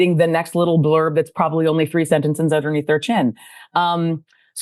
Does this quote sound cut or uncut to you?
uncut